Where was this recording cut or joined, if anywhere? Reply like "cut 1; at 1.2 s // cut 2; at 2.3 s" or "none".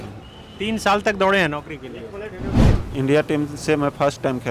cut 1; at 2.8 s